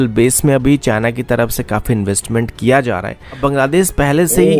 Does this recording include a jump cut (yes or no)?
yes